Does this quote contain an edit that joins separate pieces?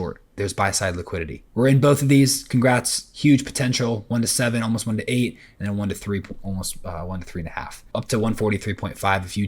yes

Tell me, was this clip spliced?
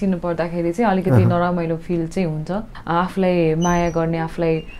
yes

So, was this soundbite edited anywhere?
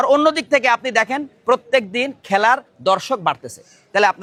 no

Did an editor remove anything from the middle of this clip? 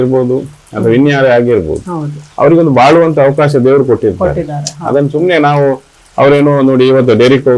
no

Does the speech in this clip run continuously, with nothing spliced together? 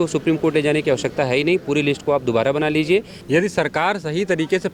no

